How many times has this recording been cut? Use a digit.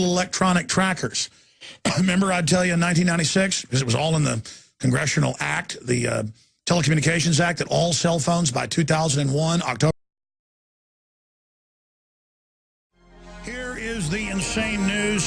0